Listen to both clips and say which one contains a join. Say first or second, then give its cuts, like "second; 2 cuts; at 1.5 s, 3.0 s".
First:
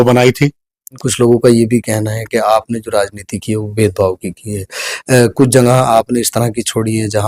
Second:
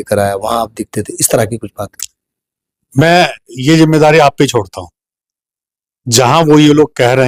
first; 1 cut; at 1.0 s